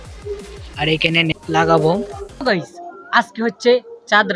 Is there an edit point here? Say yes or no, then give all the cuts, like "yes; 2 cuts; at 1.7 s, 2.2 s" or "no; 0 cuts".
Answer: yes; 2 cuts; at 1.3 s, 2.4 s